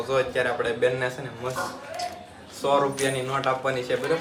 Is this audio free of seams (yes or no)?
yes